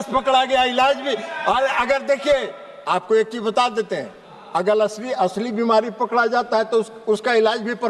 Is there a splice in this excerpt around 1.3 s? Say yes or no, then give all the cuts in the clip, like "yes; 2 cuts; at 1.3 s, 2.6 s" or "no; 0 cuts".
no; 0 cuts